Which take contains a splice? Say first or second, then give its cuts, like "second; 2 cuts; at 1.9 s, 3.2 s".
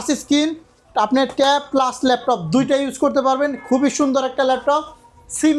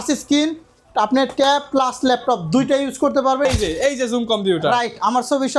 second; 1 cut; at 3.4 s